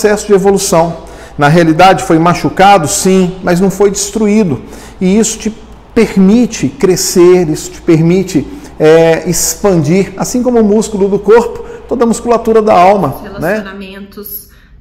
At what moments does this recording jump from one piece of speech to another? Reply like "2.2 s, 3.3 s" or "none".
13.7 s